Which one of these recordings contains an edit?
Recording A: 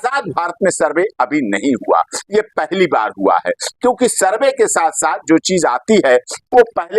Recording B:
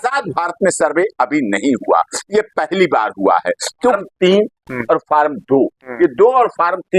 B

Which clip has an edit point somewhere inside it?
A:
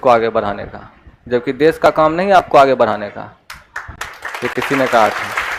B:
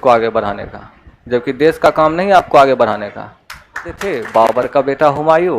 B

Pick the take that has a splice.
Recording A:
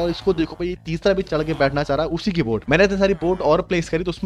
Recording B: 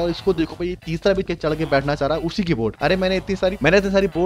A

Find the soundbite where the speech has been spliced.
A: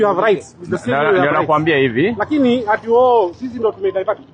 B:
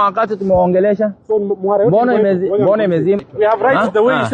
B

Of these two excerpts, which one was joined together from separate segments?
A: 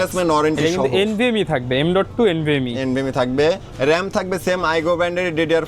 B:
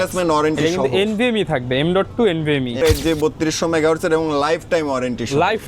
B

